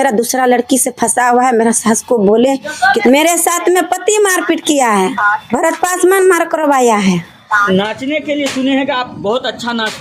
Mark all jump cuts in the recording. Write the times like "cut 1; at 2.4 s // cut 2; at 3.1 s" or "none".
cut 1; at 3.0 s // cut 2; at 7.7 s